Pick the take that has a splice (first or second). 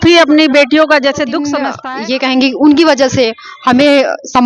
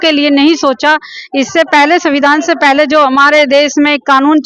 first